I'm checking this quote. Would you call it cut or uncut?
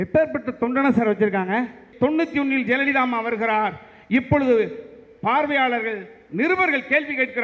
cut